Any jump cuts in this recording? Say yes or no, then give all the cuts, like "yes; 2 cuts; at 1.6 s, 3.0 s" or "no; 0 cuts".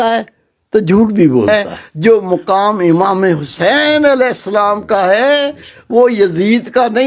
yes; 1 cut; at 1.5 s